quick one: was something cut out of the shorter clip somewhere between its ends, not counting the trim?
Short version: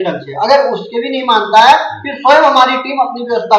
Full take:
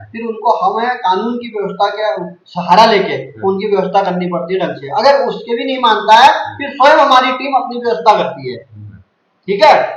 no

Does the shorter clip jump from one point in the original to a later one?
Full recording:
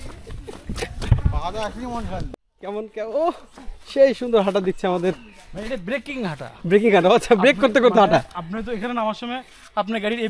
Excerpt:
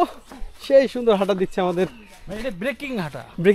no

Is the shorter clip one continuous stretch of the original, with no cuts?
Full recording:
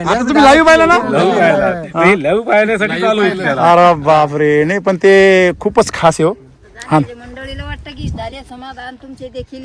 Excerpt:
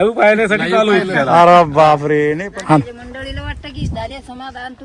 no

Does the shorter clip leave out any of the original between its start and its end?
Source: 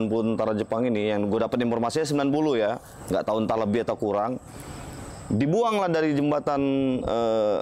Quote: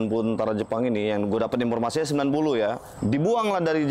yes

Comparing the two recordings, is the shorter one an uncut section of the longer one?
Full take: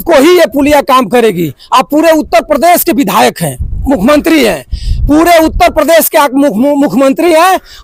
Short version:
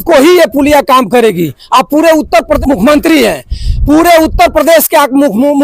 no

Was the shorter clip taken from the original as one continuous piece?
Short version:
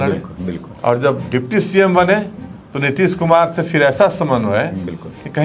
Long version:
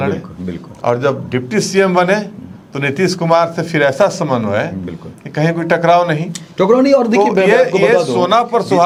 yes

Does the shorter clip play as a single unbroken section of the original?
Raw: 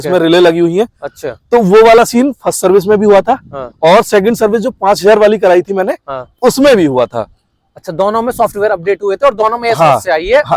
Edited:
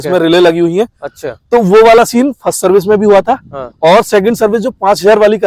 yes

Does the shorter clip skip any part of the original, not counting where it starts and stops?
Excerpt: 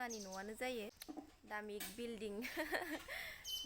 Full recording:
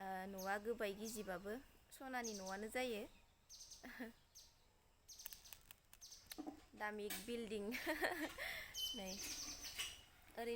yes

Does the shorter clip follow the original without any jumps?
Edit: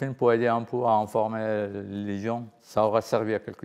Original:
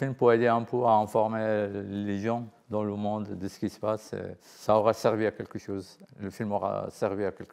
no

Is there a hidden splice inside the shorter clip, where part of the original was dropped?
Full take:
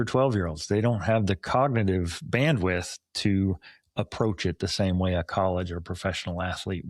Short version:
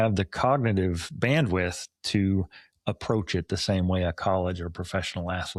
no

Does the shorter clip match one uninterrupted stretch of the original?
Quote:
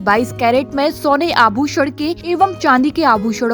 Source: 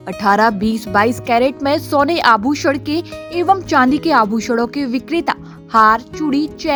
no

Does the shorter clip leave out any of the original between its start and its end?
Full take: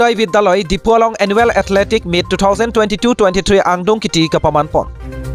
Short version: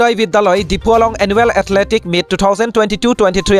no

